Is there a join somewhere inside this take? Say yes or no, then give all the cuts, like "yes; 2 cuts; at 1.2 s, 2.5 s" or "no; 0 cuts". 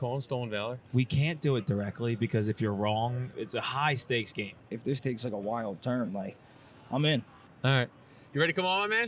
yes; 3 cuts; at 3.3 s, 4.6 s, 7.4 s